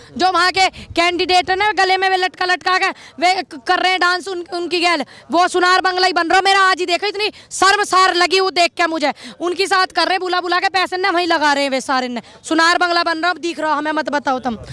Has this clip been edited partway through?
no; 0 cuts

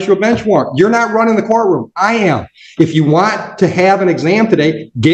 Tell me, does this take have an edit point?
no; 0 cuts

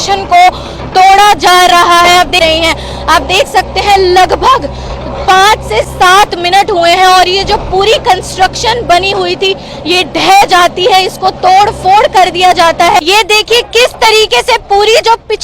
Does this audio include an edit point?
yes; 2 cuts; at 2.4 s, 13.0 s

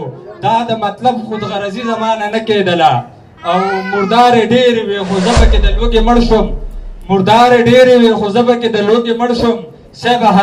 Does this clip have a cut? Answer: no; 0 cuts

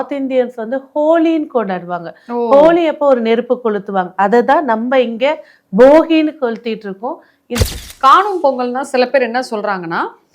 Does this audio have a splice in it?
yes; 1 cut; at 7.6 s

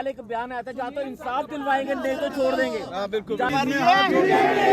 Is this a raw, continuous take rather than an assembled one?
no; 1 cut; at 3.5 s

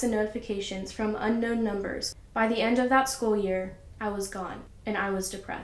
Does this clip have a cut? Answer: yes; 2 cuts; at 2.0 s, 4.7 s

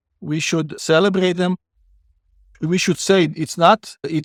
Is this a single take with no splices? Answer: yes; 0 cuts

